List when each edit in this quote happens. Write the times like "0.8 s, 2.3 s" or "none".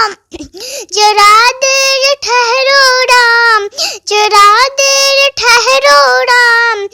none